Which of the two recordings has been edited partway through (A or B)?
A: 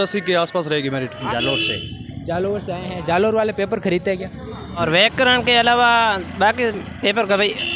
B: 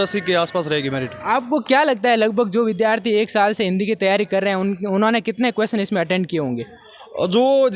A